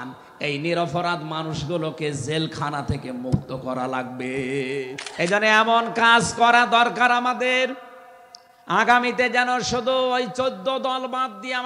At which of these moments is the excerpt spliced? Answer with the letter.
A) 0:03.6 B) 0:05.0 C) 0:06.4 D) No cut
B